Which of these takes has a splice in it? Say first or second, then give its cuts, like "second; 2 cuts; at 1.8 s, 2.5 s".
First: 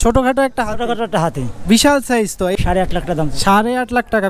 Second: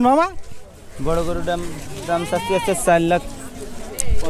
first; 1 cut; at 2.5 s